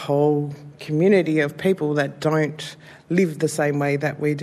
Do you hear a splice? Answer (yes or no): no